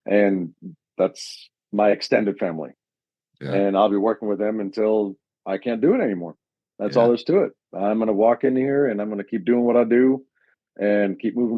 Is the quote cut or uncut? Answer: uncut